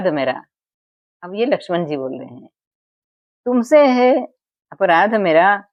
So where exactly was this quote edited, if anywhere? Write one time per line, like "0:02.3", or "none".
none